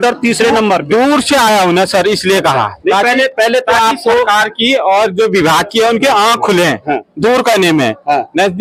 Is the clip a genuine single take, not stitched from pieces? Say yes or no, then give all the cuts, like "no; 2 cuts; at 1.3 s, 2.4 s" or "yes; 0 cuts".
yes; 0 cuts